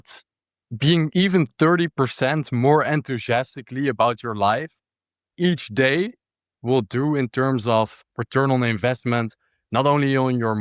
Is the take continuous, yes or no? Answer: yes